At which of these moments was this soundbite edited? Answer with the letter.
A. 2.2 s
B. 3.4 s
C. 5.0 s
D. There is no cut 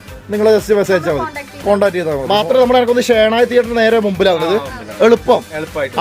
A